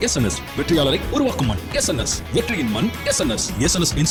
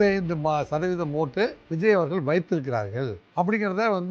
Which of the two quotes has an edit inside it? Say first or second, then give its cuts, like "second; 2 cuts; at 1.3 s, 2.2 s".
second; 2 cuts; at 1.6 s, 3.2 s